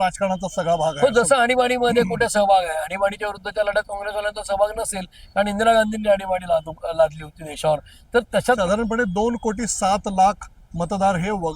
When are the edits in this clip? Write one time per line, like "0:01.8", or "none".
0:08.6